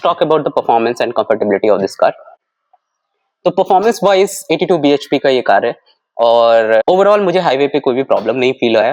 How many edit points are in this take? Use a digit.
0